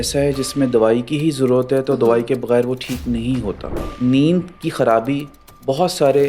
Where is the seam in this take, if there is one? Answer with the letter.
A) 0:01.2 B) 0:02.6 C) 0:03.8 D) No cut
C